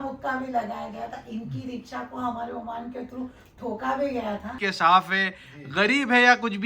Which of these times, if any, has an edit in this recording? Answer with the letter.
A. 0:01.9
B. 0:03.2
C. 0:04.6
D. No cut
C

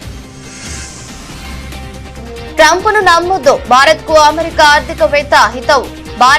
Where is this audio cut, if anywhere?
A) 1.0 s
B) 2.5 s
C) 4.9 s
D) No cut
B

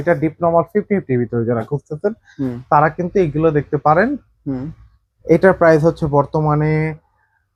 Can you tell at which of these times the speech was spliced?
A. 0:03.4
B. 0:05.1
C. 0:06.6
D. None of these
D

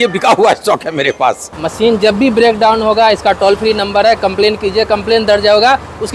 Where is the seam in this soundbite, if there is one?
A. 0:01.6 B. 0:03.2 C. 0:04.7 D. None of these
A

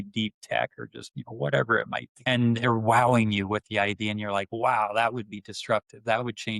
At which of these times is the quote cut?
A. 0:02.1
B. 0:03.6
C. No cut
A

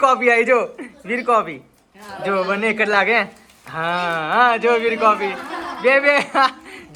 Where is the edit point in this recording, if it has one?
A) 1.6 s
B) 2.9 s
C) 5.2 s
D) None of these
D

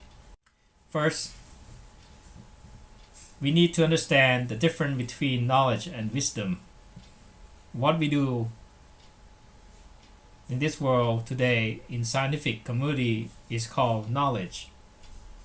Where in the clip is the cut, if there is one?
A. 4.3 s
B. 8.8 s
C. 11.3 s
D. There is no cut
A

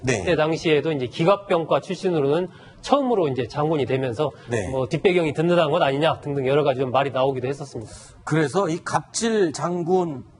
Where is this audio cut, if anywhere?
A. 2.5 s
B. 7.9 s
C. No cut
A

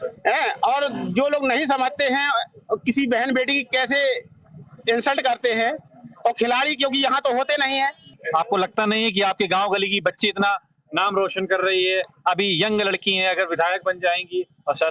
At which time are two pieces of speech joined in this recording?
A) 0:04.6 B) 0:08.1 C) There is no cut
B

